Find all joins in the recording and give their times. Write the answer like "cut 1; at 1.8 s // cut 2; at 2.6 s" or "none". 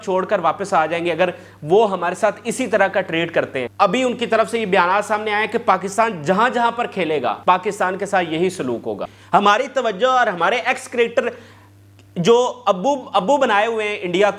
cut 1; at 3.6 s // cut 2; at 7.4 s // cut 3; at 9.1 s